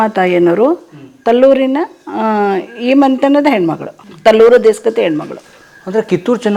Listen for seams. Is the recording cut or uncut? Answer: uncut